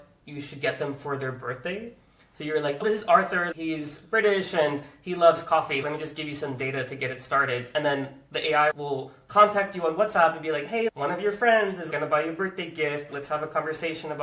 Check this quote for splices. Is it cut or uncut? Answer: cut